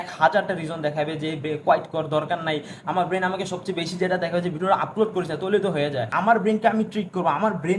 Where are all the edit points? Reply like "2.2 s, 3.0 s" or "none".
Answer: 6.1 s